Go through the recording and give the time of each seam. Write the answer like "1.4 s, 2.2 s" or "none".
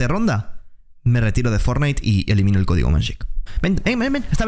3.5 s